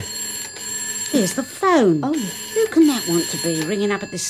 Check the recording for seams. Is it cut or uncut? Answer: uncut